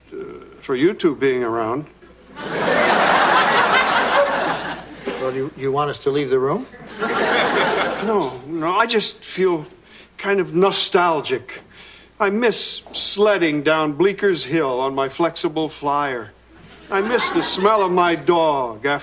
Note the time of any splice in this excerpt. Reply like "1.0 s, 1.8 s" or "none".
none